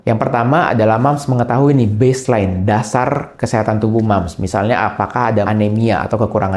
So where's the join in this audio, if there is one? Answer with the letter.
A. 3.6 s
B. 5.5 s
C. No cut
B